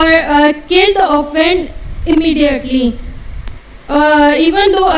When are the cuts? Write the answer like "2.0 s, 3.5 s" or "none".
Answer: none